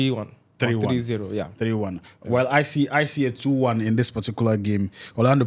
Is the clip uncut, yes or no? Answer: yes